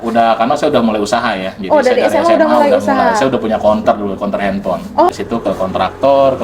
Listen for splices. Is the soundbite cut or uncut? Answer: cut